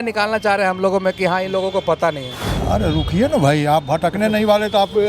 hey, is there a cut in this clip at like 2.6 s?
yes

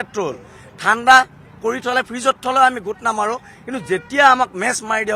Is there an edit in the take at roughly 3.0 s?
no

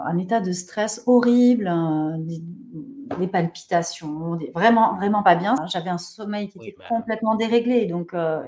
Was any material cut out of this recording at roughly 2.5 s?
no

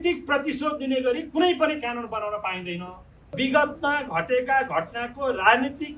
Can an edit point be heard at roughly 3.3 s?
yes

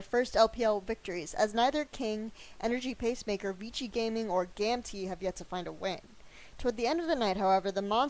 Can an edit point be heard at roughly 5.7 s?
yes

